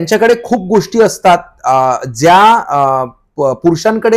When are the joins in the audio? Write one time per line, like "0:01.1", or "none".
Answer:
none